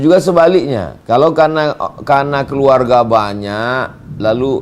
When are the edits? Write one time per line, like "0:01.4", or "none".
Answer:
0:00.9